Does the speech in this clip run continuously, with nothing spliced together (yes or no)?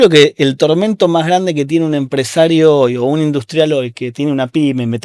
yes